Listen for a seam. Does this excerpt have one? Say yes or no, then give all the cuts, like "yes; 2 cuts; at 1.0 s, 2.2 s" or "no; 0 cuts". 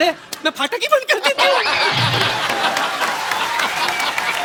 no; 0 cuts